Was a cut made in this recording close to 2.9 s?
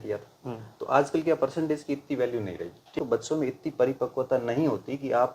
yes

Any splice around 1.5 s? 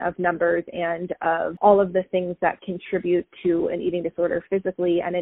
yes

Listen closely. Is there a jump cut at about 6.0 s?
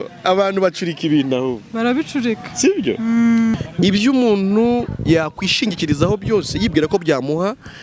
no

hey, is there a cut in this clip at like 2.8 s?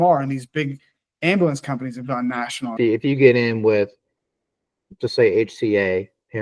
yes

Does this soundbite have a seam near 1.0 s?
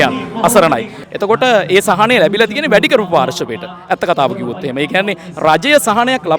yes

